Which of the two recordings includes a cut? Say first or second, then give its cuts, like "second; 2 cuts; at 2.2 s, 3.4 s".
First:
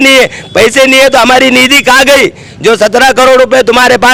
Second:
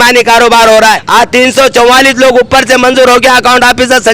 second; 1 cut; at 1.0 s